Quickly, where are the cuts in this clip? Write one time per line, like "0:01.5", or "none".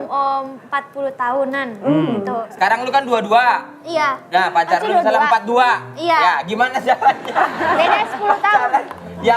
0:02.5